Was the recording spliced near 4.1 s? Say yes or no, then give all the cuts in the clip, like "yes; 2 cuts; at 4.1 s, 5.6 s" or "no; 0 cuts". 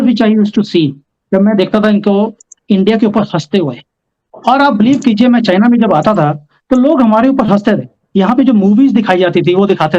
yes; 1 cut; at 4.1 s